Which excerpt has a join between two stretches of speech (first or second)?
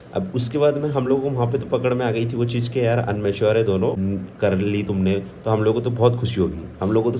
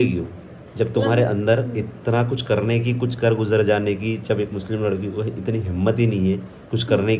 first